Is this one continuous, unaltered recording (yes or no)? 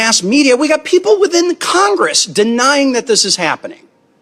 yes